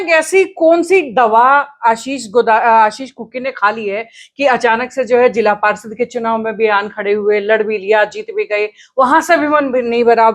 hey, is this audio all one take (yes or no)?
yes